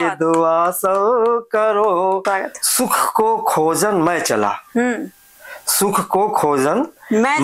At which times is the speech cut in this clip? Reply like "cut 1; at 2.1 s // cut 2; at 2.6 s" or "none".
cut 1; at 2.2 s